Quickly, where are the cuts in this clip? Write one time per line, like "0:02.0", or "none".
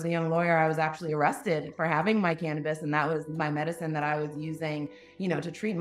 none